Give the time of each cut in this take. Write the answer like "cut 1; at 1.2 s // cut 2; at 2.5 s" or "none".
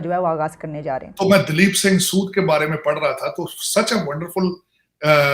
cut 1; at 1.1 s